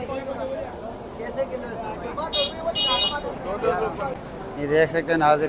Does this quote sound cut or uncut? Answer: cut